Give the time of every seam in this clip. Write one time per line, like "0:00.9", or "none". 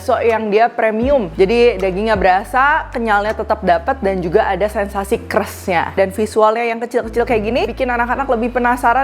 0:01.3
0:06.0
0:07.7